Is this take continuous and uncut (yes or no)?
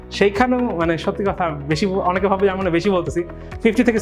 yes